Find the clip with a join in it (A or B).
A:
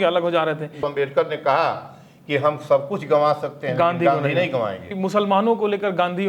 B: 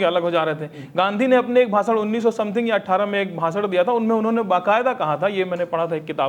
A